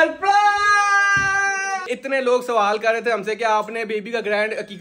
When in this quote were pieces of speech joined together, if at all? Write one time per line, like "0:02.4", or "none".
0:01.8